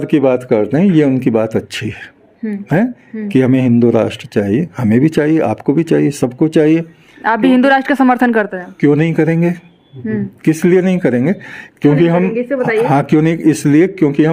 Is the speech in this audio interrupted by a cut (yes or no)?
no